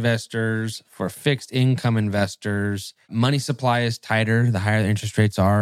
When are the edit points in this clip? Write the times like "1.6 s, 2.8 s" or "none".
3.1 s